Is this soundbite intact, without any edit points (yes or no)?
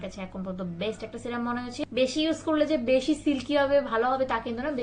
no